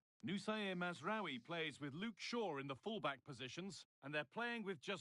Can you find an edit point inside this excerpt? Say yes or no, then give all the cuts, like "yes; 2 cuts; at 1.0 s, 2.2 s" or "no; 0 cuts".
yes; 1 cut; at 3.9 s